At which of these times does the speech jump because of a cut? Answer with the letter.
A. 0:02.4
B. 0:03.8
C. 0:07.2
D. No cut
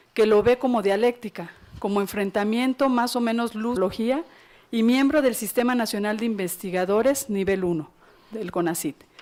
D